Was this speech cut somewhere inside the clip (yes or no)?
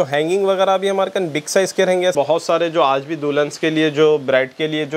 yes